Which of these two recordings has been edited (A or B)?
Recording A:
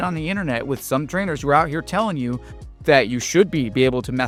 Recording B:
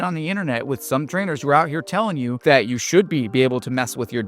B